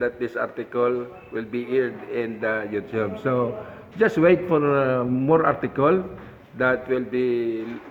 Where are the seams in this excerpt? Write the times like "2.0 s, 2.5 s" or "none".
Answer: none